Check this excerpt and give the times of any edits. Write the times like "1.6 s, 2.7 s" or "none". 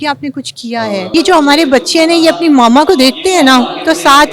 1.1 s